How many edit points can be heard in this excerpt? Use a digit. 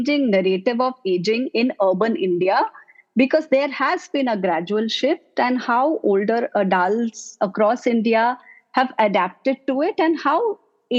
0